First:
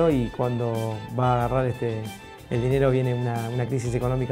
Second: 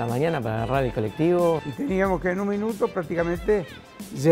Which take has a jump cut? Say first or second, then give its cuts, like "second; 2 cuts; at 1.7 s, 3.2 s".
second; 1 cut; at 1.6 s